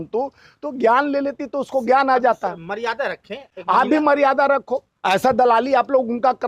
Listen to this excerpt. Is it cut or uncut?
uncut